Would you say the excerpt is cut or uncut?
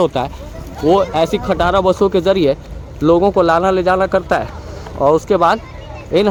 uncut